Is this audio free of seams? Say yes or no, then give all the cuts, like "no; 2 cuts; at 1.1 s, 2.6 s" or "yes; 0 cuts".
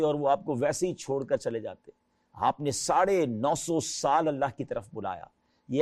yes; 0 cuts